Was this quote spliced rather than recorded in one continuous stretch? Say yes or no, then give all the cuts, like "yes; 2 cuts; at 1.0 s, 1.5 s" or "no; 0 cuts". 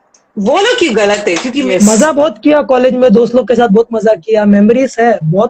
yes; 1 cut; at 1.7 s